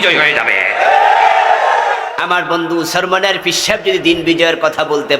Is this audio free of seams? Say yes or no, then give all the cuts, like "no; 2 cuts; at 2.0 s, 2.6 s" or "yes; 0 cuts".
no; 1 cut; at 2.1 s